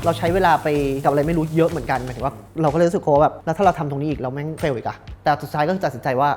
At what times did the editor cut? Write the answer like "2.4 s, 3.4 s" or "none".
1.0 s, 3.4 s, 4.6 s